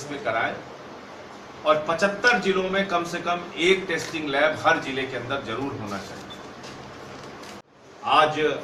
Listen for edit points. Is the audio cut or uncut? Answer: cut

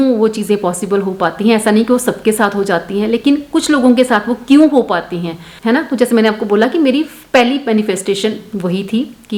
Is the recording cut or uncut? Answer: uncut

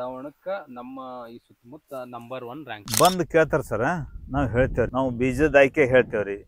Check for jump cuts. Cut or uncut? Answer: cut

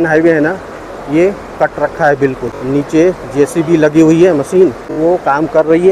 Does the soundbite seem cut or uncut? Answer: cut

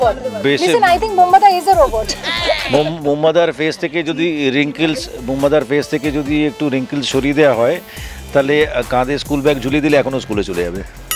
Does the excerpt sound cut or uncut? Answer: uncut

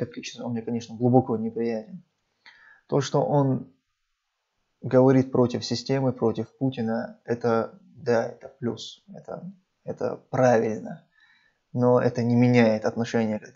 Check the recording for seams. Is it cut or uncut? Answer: uncut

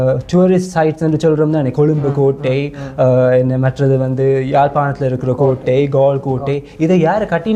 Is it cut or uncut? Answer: uncut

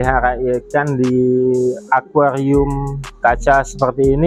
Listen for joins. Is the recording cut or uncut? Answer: uncut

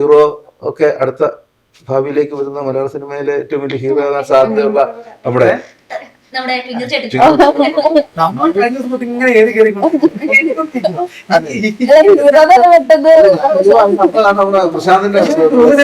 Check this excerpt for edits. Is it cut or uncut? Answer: uncut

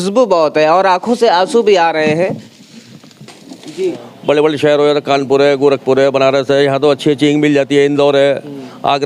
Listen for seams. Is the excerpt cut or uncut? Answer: cut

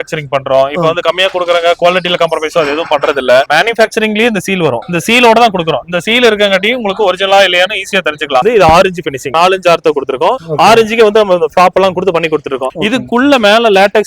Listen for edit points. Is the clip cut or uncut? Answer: cut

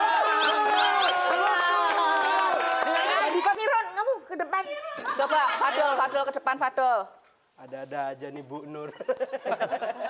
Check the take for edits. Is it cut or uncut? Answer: cut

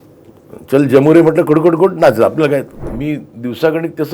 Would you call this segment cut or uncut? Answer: cut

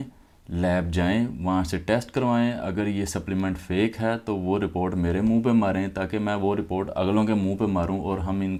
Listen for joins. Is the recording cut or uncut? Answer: uncut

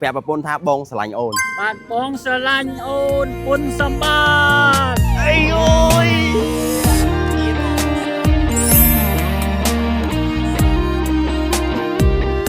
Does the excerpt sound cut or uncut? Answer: cut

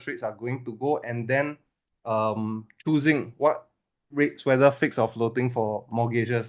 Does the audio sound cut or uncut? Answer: uncut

